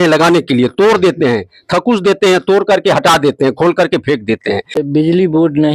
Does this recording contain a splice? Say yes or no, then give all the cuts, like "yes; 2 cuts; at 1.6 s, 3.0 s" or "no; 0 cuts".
yes; 1 cut; at 4.8 s